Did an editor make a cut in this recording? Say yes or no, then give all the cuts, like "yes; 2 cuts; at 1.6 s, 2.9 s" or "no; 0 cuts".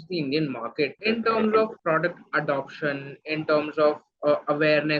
yes; 2 cuts; at 1.0 s, 1.8 s